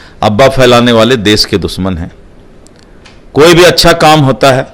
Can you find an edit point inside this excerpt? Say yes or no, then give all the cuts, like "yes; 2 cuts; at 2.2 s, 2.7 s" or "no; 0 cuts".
no; 0 cuts